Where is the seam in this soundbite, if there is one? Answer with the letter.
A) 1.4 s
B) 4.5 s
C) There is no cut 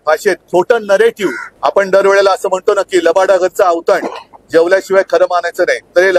A